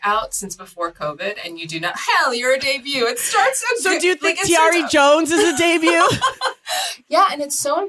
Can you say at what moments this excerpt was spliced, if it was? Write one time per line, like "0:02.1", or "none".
none